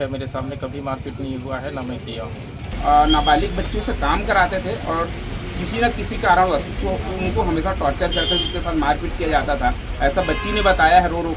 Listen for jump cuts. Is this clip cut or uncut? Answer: cut